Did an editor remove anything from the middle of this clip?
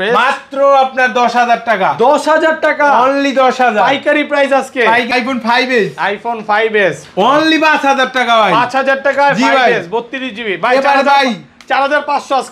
yes; 1 cut; at 5.1 s

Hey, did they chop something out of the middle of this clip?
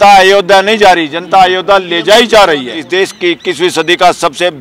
yes; 1 cut; at 2.8 s

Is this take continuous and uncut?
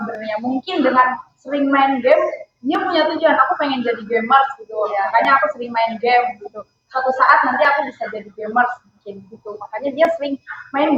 yes; 0 cuts

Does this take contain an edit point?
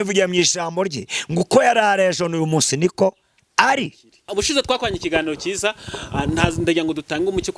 yes; 1 cut; at 4.3 s

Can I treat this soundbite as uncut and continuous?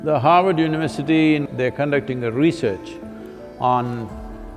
no; 1 cut; at 1.5 s

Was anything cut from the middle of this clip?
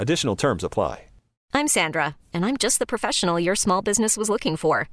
yes; 1 cut; at 1.4 s

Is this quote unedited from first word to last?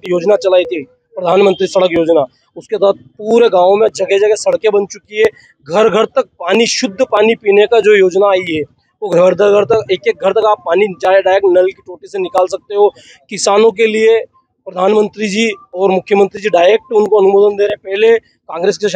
yes; 0 cuts

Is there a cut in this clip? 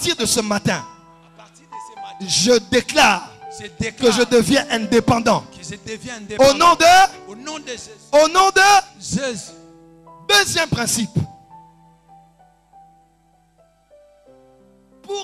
no; 0 cuts

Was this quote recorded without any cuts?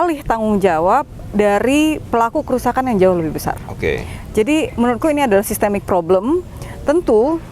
yes; 0 cuts

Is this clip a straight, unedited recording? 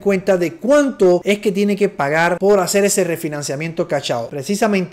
no; 2 cuts; at 1.2 s, 2.4 s

